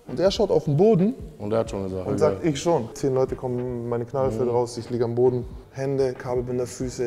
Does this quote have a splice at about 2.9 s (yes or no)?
yes